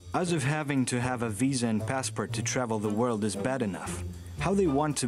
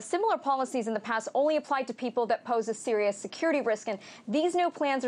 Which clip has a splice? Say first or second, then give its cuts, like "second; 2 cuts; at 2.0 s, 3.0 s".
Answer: second; 1 cut; at 1.4 s